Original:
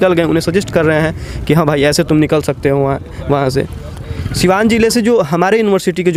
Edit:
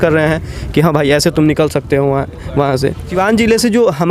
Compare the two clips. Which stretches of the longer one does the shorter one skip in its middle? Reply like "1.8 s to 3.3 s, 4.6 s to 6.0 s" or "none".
3.8 s to 4.4 s